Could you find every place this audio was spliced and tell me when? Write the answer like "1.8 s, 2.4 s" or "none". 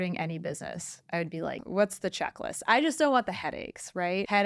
1.6 s